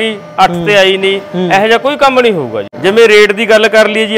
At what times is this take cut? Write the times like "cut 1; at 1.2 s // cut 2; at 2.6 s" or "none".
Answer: cut 1; at 2.6 s